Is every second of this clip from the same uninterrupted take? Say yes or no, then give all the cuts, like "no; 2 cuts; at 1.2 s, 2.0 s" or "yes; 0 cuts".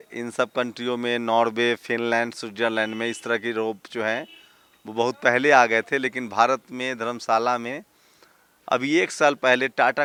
yes; 0 cuts